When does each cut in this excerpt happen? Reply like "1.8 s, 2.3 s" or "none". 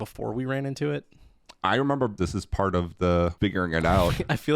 2.1 s, 3.3 s